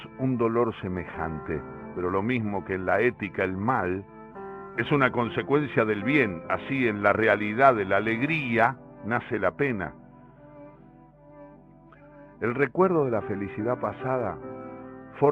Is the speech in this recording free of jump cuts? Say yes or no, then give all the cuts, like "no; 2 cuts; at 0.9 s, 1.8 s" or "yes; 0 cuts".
no; 1 cut; at 4.3 s